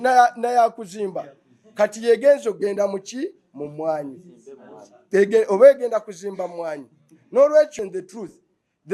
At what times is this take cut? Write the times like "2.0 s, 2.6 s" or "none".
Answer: 7.7 s